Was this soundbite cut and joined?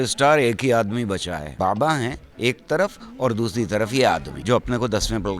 yes; 3 cuts; at 1.5 s, 2.2 s, 4.3 s

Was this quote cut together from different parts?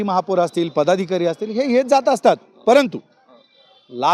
no; 0 cuts

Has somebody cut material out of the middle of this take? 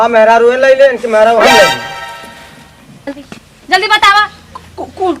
yes; 1 cut; at 3.1 s

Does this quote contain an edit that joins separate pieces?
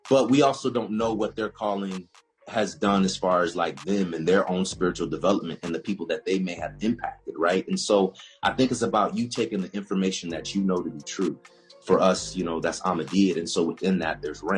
no; 0 cuts

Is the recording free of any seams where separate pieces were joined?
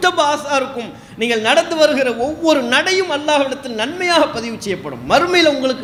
yes; 0 cuts

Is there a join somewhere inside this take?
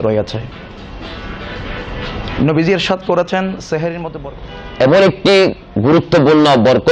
yes; 1 cut; at 4.1 s

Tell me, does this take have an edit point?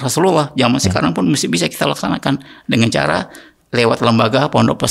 yes; 1 cut; at 3.6 s

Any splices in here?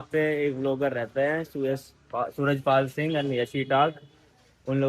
no; 0 cuts

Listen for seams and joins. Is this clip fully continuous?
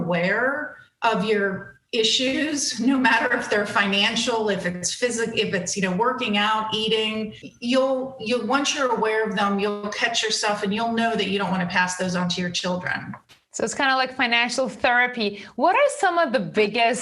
yes; 0 cuts

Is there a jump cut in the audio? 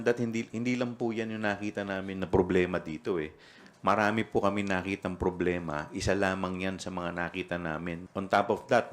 yes; 1 cut; at 8.0 s

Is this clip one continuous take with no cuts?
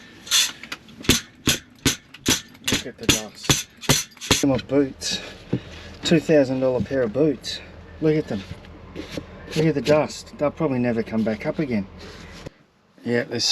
no; 2 cuts; at 4.4 s, 12.4 s

